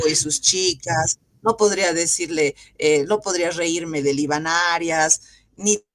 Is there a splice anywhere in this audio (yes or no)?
no